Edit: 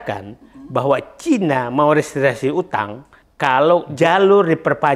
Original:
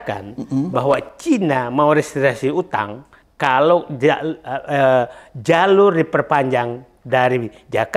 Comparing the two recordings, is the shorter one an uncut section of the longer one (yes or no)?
no